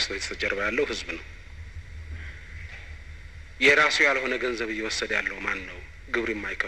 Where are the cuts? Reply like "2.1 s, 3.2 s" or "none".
4.2 s